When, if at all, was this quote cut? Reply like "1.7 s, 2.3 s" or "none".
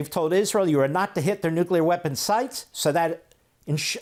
none